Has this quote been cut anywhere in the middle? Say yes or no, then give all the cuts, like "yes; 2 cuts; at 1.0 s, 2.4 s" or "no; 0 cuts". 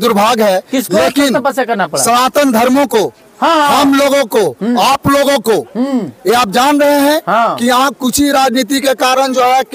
no; 0 cuts